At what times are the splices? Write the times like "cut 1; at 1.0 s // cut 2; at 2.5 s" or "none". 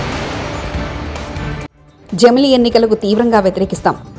cut 1; at 1.7 s